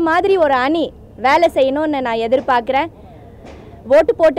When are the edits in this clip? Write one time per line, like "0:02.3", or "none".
none